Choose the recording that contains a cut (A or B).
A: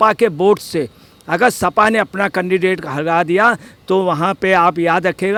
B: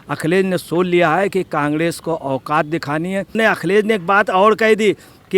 B